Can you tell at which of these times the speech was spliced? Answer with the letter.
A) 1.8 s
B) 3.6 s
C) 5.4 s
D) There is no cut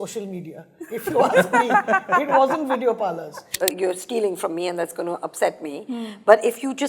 B